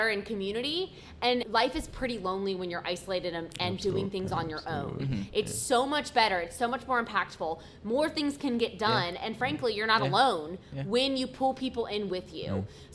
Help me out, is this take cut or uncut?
cut